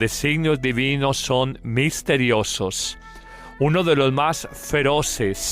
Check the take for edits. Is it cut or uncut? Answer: cut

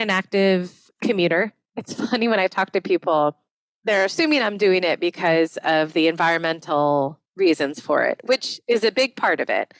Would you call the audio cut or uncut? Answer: cut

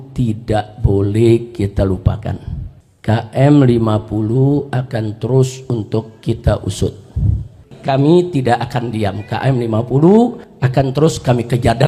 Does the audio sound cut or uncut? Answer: cut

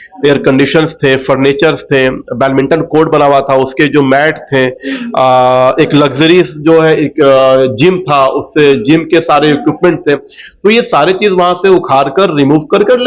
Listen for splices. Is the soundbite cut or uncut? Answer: uncut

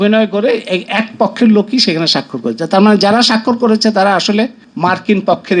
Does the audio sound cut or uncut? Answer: cut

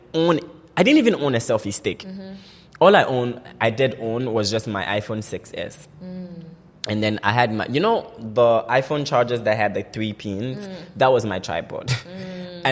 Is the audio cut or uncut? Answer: uncut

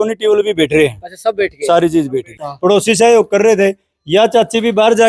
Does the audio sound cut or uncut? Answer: cut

